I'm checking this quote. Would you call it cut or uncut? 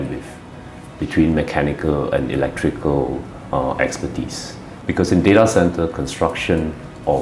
cut